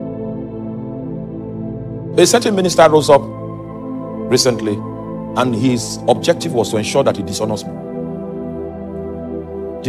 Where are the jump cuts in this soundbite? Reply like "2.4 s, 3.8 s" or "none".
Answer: 1.1 s